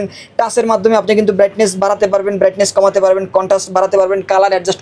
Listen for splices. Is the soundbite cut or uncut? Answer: uncut